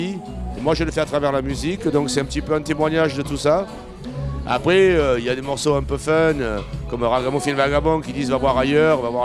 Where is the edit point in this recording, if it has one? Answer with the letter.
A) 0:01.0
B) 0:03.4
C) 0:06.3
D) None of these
C